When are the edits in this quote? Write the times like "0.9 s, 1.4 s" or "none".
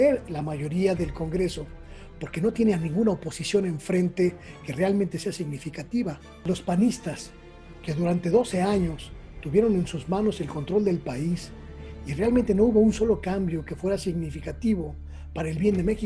6.5 s